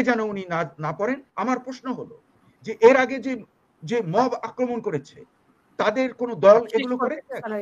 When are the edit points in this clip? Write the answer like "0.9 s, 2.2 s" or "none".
1.3 s